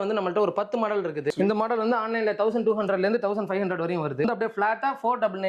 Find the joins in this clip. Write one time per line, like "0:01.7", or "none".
0:01.3
0:04.2